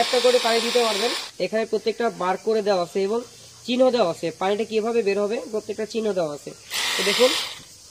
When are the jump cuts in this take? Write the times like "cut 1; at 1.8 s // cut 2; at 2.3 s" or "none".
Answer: cut 1; at 1.2 s